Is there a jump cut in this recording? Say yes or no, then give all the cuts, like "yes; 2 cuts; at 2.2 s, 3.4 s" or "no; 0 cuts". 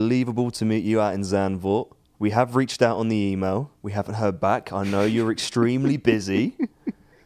yes; 2 cuts; at 2.0 s, 3.8 s